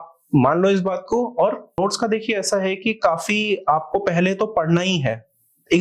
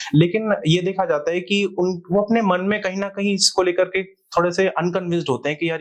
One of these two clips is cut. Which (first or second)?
first